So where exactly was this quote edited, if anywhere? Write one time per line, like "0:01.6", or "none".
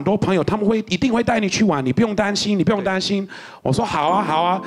none